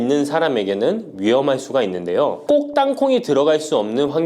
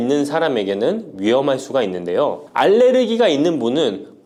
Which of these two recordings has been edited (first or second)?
first